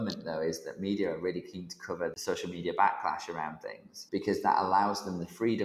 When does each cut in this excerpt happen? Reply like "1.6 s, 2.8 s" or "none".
2.1 s, 4.0 s